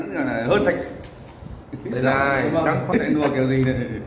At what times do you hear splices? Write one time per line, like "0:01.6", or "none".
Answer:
0:02.9